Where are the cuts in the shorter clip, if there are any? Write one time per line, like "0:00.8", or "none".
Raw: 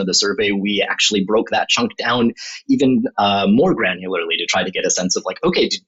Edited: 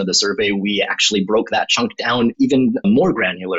0:02.7

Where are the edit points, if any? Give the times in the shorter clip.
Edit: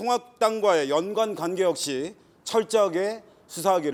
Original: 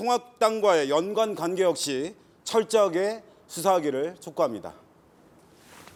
none

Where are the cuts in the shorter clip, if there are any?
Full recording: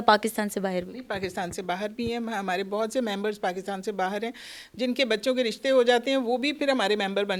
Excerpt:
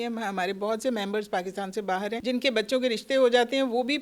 0:02.2

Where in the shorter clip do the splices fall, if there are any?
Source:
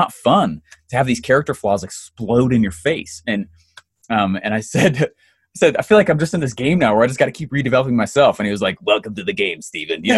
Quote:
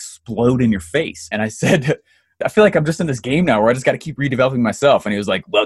0:01.3
0:02.4

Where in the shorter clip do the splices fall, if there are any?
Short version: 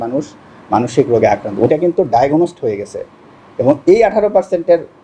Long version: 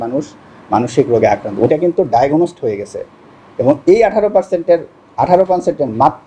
none

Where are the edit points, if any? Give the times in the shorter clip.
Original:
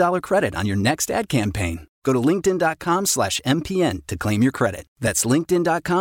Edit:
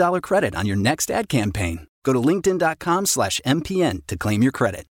none

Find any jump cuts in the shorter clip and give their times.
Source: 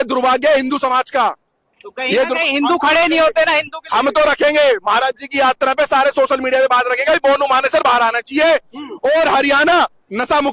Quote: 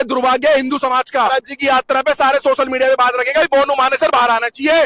0:01.3

